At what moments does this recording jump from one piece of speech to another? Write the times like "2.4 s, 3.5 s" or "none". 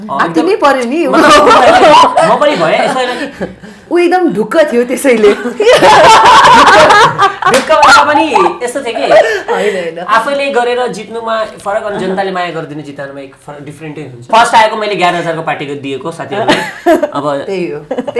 3.8 s, 14.3 s